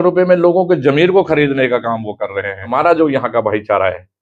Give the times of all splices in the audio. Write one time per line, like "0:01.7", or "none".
0:02.7